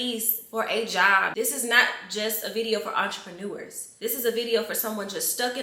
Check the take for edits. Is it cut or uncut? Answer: cut